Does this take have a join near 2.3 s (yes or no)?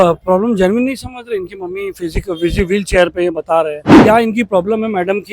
no